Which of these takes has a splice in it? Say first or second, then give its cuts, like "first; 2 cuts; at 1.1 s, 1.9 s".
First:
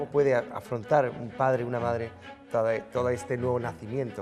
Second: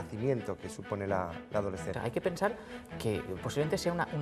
second; 1 cut; at 1.9 s